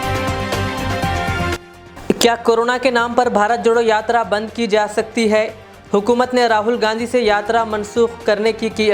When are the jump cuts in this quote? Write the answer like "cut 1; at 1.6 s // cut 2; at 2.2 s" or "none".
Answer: cut 1; at 1.5 s